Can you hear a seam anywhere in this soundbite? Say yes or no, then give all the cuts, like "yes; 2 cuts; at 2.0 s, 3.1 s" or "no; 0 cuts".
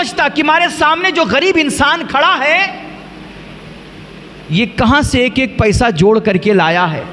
no; 0 cuts